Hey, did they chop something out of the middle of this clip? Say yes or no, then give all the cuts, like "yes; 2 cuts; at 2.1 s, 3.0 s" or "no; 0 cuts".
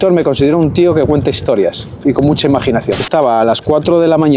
yes; 1 cut; at 3.1 s